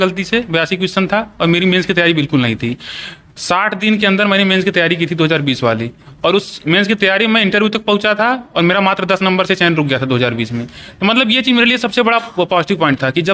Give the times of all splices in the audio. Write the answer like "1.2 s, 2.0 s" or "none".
none